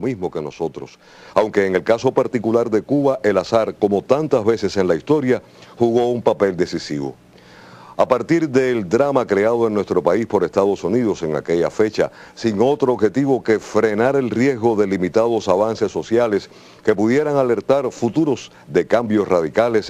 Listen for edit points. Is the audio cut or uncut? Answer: cut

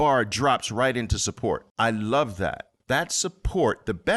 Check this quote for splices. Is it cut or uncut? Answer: cut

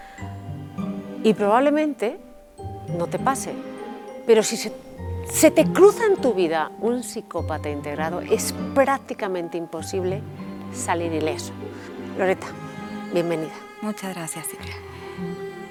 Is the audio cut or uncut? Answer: uncut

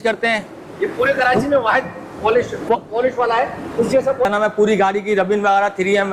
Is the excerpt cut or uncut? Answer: cut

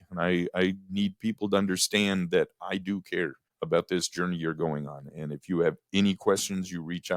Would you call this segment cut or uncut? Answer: cut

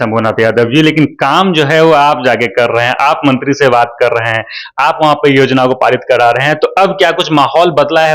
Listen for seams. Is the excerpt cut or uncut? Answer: uncut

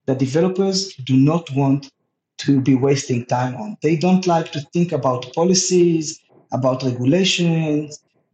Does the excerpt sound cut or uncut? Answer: uncut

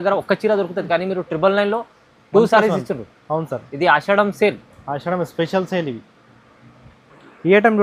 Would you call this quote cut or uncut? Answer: uncut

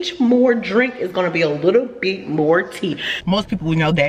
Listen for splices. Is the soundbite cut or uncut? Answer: cut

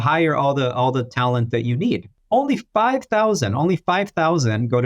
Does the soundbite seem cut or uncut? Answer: cut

